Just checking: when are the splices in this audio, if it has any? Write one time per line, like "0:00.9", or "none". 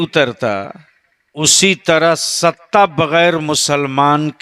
0:01.5